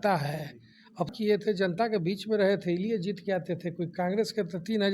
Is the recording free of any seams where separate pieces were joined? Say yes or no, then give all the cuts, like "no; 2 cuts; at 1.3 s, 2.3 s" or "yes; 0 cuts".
no; 1 cut; at 1.1 s